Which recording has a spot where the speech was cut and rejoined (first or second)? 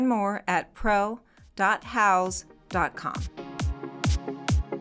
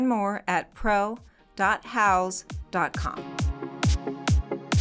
first